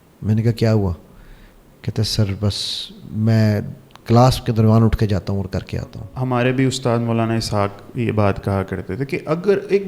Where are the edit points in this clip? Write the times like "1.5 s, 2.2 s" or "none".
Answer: 6.1 s